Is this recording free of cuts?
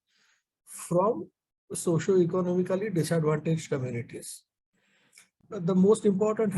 no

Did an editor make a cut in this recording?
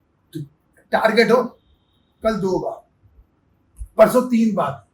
no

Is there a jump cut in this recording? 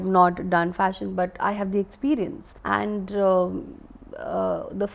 no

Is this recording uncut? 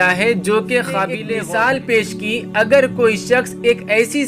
no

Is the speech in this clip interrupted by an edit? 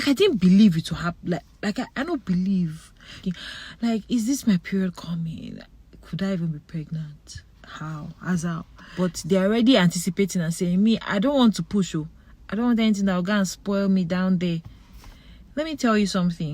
yes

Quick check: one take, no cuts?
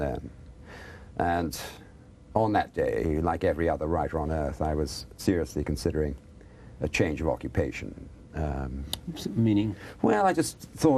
no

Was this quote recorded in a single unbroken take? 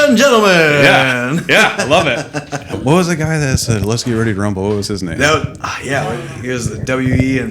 no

